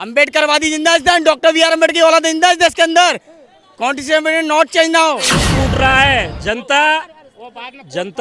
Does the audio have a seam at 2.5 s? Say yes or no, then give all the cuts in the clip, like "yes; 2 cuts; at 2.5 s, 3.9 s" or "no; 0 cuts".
no; 1 cut; at 5.4 s